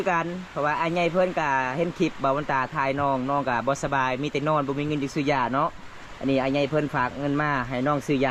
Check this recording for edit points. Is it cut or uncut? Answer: uncut